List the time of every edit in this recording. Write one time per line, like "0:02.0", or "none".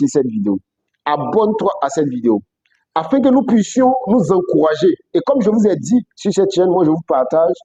none